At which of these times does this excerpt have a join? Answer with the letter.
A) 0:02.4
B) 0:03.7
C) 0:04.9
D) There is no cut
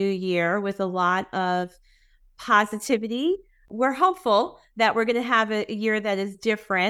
B